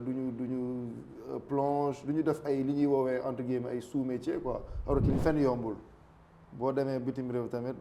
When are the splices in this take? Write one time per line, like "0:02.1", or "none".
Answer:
0:05.2

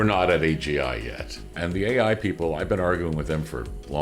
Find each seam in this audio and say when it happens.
0:01.6

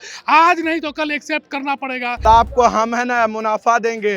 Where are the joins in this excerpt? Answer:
0:02.2

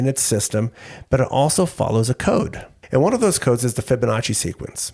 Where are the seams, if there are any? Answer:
0:02.7

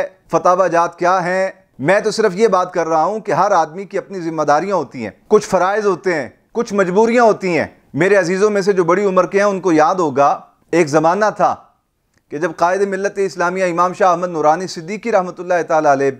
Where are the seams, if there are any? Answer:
none

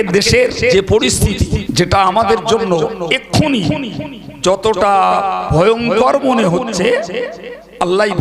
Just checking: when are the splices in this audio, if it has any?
0:00.7
0:01.7

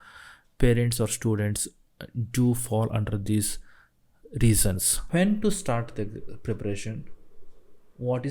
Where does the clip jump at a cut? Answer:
0:04.9

